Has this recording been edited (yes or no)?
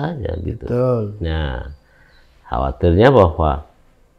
no